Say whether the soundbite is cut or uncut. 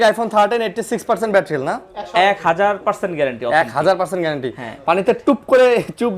uncut